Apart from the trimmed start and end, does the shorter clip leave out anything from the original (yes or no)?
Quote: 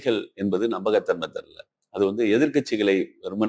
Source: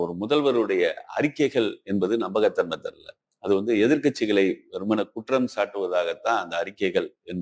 no